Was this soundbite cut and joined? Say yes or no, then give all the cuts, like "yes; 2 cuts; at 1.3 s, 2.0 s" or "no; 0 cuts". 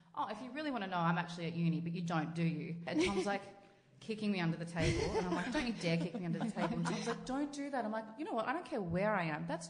yes; 1 cut; at 2.8 s